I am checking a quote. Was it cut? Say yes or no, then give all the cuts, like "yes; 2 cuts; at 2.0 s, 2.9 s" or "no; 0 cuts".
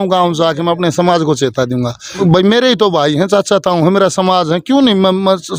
yes; 1 cut; at 2.2 s